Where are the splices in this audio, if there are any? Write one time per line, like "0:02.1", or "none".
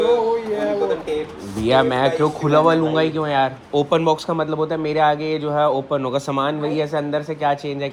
none